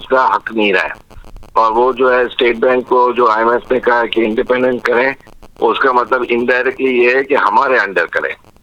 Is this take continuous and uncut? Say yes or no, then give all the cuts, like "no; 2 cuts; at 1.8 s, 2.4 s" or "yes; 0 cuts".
yes; 0 cuts